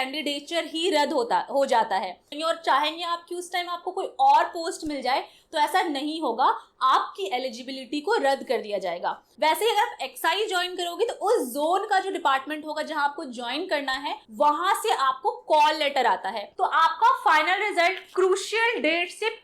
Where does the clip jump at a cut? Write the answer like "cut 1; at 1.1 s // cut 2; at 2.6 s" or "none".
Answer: cut 1; at 2.3 s // cut 2; at 9.2 s // cut 3; at 16.5 s